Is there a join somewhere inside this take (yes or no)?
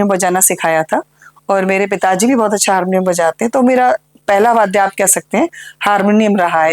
no